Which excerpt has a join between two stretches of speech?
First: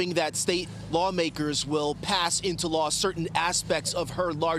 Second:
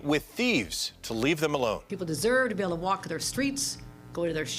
second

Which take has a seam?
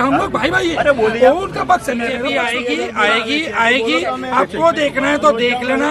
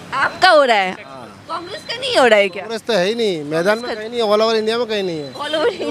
first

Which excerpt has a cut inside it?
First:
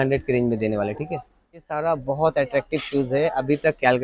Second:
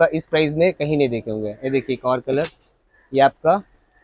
first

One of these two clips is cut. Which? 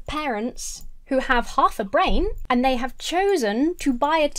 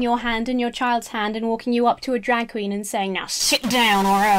first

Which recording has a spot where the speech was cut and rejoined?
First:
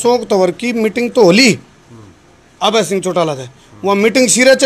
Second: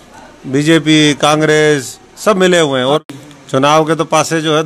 second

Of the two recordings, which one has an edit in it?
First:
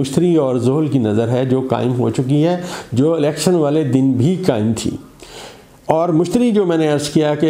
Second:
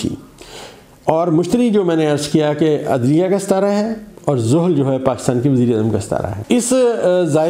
second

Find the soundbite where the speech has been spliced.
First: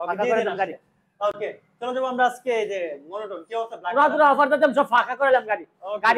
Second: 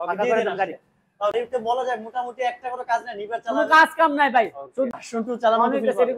second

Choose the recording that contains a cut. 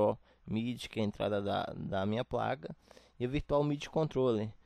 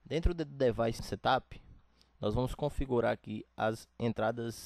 second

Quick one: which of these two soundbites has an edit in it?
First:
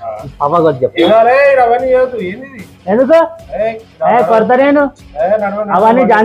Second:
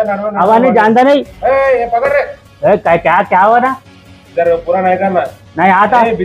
second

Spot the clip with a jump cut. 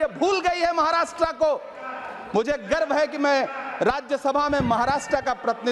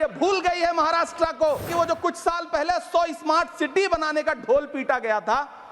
second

